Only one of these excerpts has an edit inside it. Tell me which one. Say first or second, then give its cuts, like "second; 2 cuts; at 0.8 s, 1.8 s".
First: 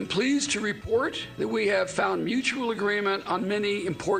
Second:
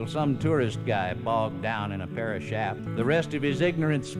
second; 1 cut; at 2.8 s